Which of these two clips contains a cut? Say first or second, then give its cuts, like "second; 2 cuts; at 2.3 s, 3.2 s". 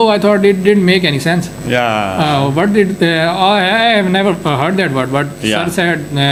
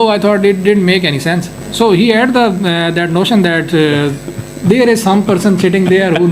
second; 1 cut; at 1.6 s